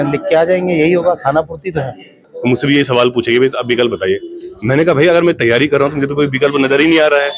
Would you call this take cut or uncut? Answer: cut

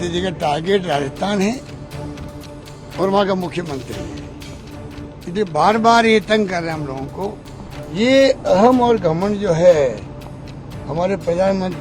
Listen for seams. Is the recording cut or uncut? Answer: cut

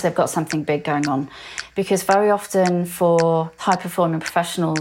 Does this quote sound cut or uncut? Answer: cut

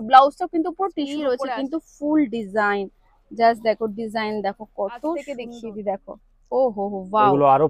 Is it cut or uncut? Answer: cut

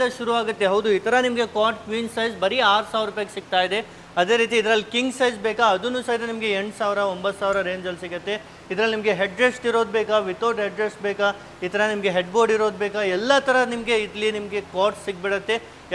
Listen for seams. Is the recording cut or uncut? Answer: uncut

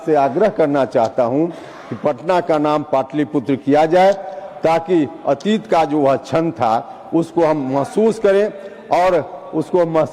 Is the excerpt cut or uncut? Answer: uncut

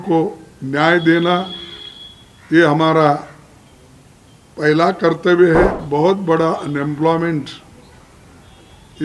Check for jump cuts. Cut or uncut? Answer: cut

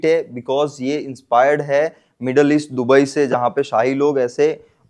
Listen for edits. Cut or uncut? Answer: uncut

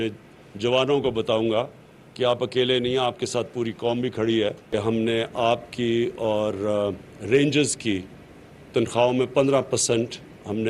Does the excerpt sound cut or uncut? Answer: cut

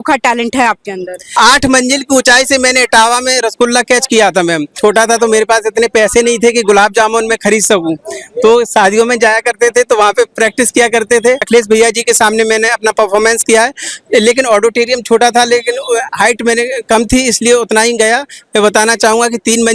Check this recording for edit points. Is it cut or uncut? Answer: cut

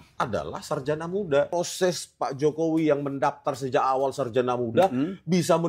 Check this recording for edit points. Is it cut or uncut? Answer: cut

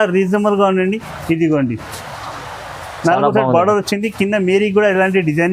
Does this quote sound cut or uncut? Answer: uncut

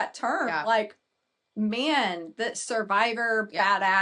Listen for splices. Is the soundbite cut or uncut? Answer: uncut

